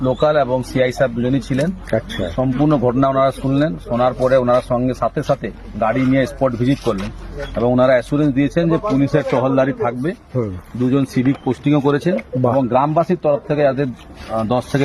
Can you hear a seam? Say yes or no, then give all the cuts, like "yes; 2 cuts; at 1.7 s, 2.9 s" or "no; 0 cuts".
no; 0 cuts